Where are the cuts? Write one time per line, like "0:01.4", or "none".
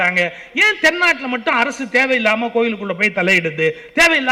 none